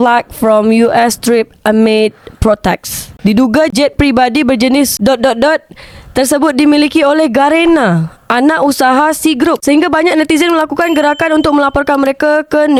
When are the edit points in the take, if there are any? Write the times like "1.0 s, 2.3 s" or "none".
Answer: none